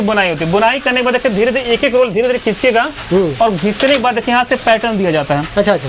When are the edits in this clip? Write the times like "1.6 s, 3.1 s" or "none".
none